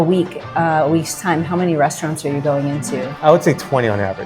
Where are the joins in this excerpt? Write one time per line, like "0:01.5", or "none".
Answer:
none